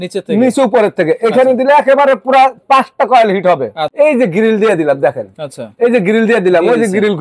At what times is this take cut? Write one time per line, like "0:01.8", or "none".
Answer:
0:03.8